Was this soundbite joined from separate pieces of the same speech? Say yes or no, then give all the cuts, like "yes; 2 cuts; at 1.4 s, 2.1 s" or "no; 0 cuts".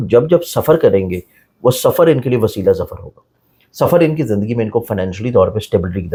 no; 0 cuts